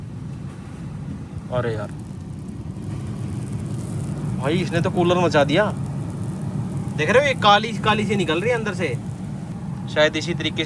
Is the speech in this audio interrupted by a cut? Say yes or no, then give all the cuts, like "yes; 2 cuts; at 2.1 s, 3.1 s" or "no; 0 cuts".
yes; 1 cut; at 9.5 s